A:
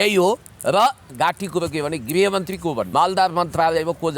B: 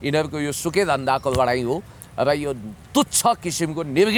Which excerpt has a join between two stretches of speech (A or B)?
A